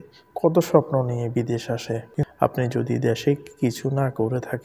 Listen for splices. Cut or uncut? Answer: cut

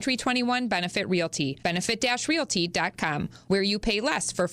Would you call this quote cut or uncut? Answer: cut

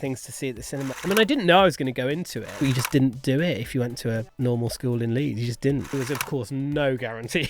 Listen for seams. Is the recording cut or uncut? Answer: cut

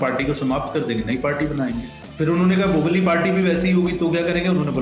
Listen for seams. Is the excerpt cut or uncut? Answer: cut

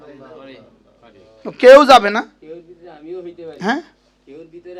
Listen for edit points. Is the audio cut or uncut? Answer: uncut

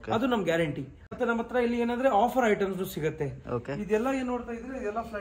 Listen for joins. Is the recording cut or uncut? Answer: cut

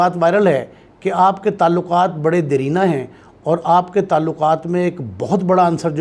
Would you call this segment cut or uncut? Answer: uncut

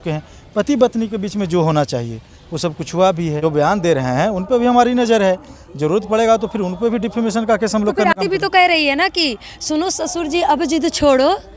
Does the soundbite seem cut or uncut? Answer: cut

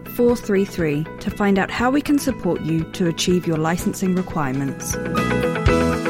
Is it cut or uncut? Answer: cut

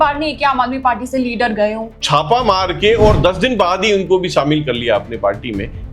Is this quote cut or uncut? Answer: cut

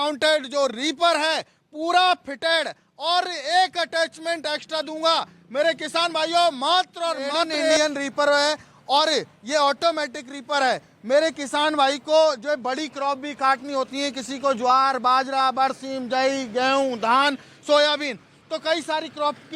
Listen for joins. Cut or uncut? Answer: cut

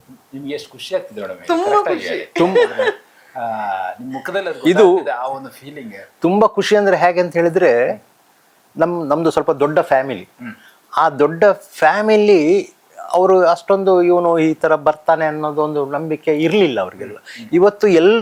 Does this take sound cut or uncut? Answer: uncut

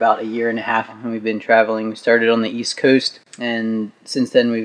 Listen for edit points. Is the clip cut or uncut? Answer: cut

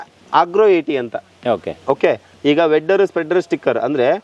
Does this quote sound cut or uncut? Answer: uncut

